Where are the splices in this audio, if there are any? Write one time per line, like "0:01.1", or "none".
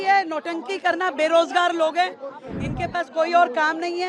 none

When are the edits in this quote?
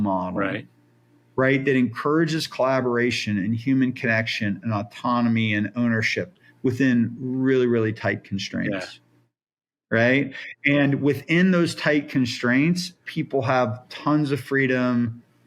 none

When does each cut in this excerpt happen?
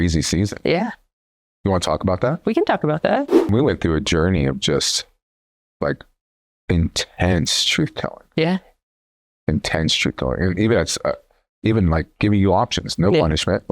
0:03.5

